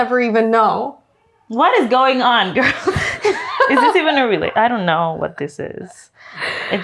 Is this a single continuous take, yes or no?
no